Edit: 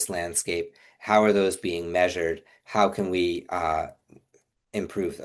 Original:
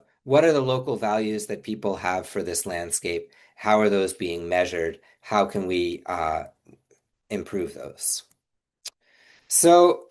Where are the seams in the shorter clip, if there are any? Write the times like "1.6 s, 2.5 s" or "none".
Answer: none